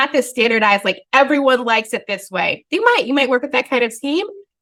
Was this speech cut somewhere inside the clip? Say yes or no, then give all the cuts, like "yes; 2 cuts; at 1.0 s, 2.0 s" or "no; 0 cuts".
no; 0 cuts